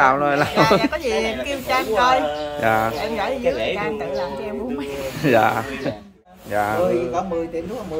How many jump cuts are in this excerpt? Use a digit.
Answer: 1